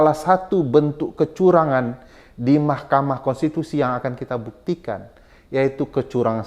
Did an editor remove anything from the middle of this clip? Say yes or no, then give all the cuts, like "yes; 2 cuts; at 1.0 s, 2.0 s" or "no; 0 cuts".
no; 0 cuts